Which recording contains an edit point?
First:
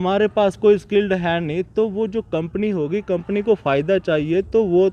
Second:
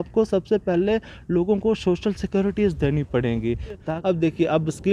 second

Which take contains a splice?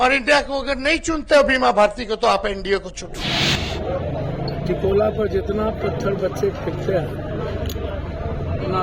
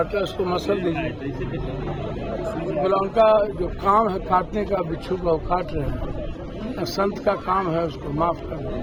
first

